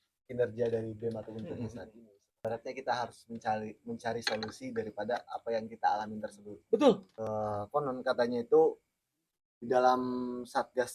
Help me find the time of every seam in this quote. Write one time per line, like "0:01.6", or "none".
0:02.4
0:07.1